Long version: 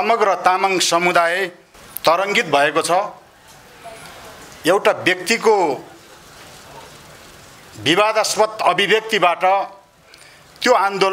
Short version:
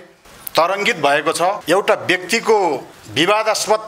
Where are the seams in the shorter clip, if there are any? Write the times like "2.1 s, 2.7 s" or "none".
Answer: 1.6 s, 3.0 s